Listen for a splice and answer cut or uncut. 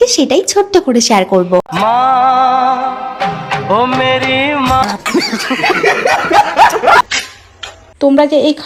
uncut